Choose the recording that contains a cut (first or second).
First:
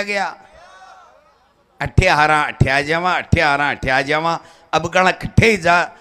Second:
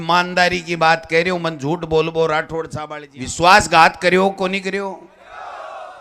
second